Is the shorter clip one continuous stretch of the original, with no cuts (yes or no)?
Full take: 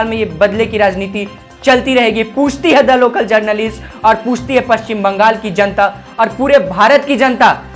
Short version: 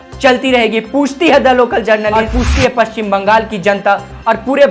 no